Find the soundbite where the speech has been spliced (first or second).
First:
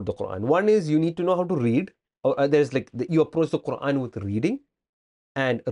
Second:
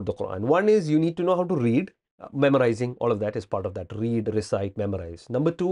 second